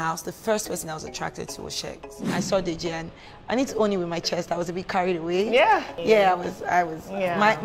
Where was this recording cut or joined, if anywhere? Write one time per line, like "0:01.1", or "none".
0:02.3
0:05.9

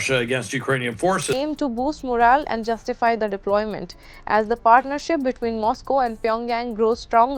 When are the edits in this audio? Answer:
0:01.3

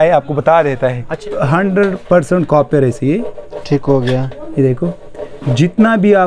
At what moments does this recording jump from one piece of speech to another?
0:01.2

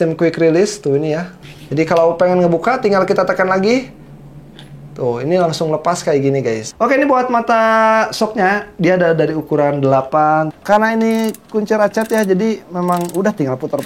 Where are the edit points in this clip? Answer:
0:01.4
0:06.7
0:10.6

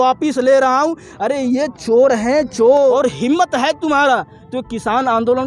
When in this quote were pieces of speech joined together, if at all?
0:02.9

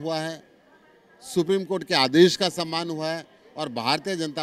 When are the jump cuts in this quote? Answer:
none

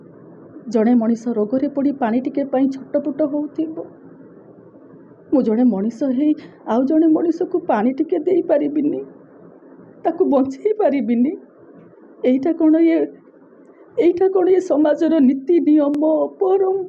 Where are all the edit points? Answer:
0:16.0

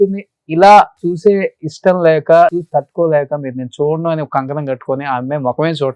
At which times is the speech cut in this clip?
0:02.6

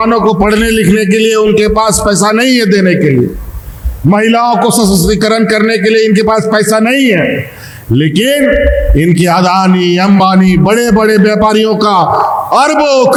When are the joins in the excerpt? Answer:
none

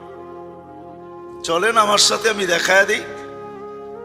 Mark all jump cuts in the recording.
0:03.0

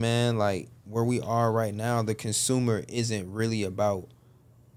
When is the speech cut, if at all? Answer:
none

